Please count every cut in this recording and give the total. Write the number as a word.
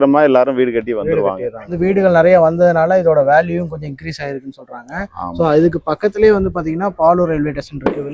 one